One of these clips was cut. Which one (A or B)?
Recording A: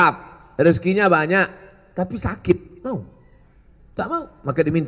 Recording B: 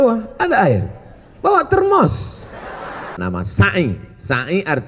B